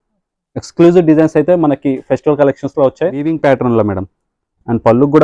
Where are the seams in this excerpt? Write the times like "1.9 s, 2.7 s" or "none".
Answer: 3.3 s